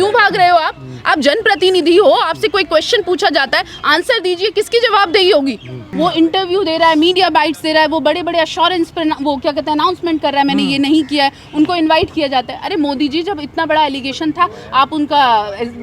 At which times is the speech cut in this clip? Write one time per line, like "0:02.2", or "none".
0:05.9